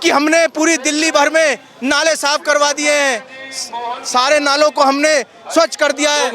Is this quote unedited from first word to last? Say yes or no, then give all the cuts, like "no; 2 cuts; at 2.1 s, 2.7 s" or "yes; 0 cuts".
yes; 0 cuts